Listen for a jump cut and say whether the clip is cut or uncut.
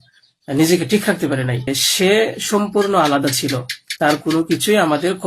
cut